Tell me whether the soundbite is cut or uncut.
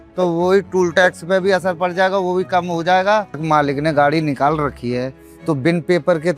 cut